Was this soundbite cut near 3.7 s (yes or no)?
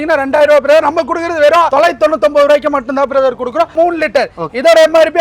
yes